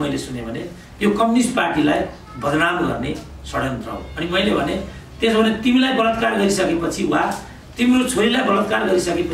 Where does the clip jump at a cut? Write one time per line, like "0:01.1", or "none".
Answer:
none